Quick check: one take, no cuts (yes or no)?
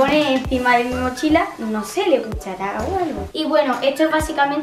no